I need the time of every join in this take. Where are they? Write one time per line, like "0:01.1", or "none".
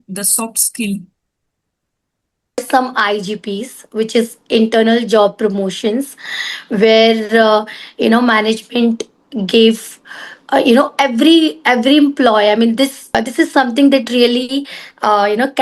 0:02.6
0:13.1